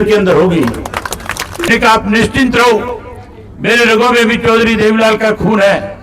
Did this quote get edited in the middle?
yes; 1 cut; at 1.7 s

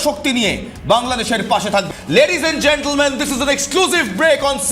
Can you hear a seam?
yes; 1 cut; at 1.9 s

